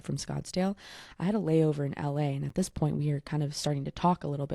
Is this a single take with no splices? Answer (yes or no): yes